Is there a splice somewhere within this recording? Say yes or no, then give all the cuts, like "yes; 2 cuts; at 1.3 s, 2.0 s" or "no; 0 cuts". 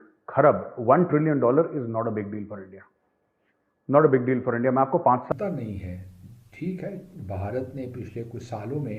yes; 1 cut; at 5.0 s